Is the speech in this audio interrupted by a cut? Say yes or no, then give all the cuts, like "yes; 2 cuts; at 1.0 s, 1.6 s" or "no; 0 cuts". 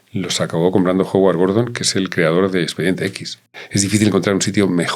yes; 1 cut; at 3.6 s